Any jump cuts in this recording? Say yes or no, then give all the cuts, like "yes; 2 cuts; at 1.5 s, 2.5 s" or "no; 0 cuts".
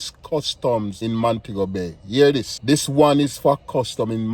yes; 2 cuts; at 0.9 s, 2.5 s